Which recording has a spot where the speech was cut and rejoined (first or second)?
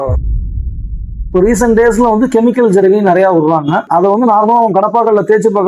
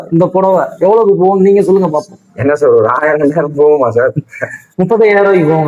first